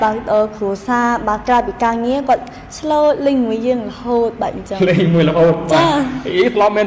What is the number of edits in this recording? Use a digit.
0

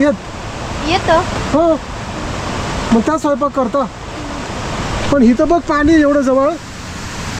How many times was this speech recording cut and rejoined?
0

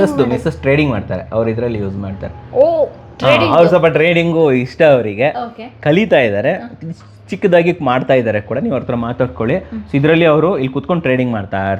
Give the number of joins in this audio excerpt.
0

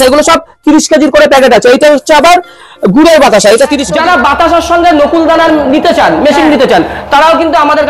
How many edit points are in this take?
1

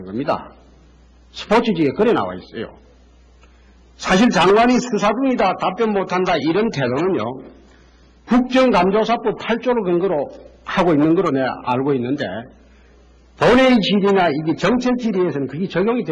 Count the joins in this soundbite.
1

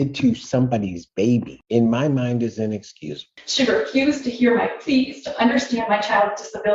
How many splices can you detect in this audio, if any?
1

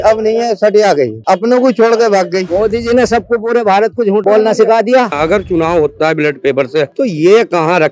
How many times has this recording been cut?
2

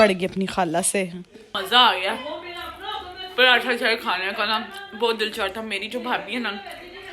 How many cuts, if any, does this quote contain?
1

